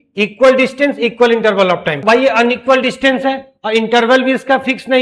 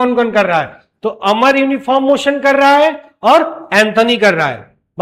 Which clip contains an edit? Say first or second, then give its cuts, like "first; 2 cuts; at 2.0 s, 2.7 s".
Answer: first; 1 cut; at 2.0 s